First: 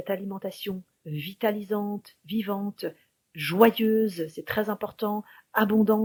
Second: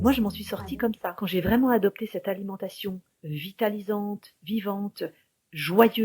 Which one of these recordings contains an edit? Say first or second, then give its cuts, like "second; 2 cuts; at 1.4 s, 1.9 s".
second; 1 cut; at 1.2 s